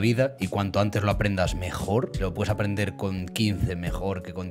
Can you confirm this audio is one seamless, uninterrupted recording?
yes; 0 cuts

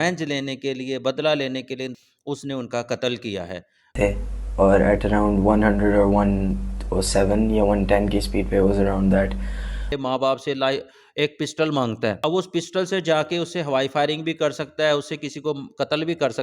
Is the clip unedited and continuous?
no; 4 cuts; at 2.0 s, 4.0 s, 9.9 s, 12.2 s

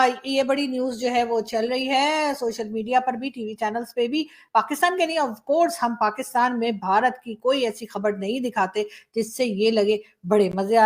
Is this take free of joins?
yes; 0 cuts

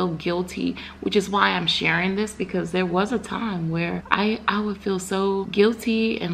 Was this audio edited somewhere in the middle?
yes; 2 cuts; at 4.0 s, 5.5 s

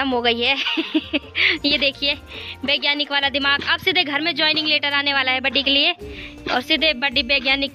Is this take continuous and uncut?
yes; 0 cuts

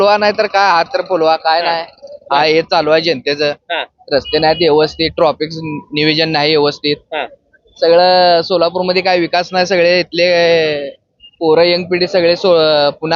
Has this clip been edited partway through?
no; 0 cuts

